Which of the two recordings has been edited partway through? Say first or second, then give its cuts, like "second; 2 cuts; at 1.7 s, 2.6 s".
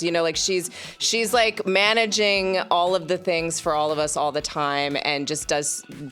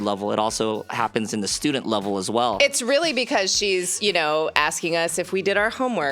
second; 1 cut; at 2.6 s